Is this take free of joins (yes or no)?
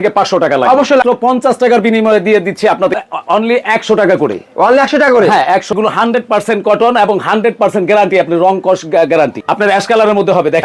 no